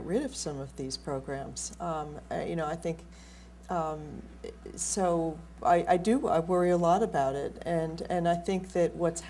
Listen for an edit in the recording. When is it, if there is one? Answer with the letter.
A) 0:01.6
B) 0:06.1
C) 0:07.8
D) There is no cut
A